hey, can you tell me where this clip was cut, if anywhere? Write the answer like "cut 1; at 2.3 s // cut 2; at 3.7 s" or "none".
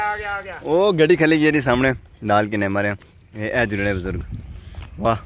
none